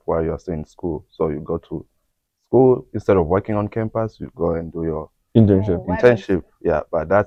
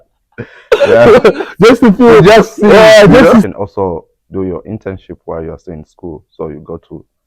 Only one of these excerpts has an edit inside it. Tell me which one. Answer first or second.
second